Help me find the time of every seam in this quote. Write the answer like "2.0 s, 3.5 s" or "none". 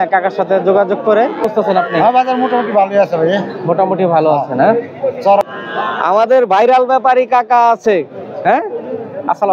1.4 s, 5.4 s